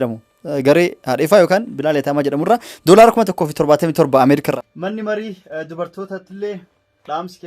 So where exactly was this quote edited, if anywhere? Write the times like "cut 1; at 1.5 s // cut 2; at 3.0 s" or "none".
cut 1; at 4.4 s